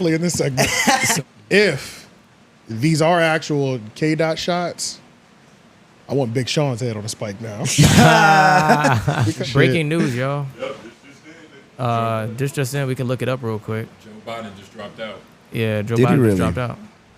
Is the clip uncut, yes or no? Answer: no